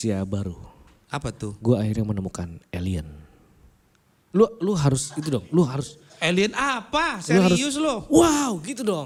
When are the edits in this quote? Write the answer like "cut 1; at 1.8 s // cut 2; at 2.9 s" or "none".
none